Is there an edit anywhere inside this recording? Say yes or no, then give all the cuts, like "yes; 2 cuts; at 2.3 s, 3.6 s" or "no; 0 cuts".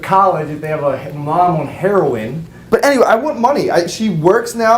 yes; 1 cut; at 2.5 s